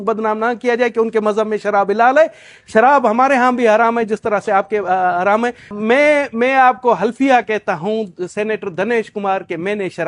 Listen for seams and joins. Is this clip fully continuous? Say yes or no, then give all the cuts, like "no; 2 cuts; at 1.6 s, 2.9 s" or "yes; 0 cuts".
no; 1 cut; at 5.8 s